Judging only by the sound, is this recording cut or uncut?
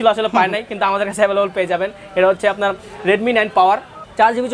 uncut